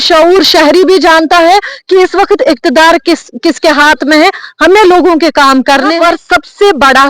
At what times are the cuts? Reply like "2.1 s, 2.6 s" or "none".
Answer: 5.9 s